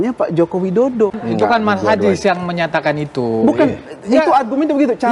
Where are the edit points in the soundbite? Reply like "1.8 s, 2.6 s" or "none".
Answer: 1.2 s